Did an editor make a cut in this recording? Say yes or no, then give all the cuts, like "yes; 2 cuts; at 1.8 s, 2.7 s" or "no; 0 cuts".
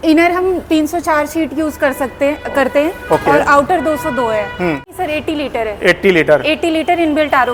no; 0 cuts